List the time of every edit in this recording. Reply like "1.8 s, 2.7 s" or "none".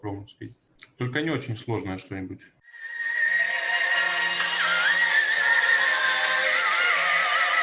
none